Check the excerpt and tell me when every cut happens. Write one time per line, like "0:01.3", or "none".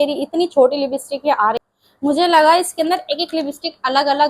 0:01.6